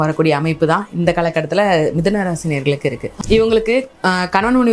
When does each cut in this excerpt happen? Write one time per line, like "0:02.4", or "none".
0:03.1